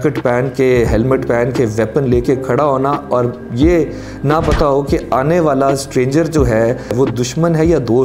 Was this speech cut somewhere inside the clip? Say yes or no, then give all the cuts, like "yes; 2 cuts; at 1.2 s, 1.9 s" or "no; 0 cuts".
yes; 1 cut; at 6.9 s